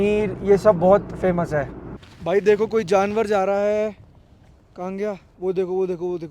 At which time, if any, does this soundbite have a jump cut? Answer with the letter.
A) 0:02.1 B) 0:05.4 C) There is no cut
A